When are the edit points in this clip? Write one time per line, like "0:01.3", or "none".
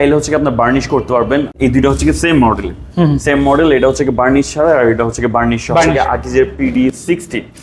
0:01.5
0:05.9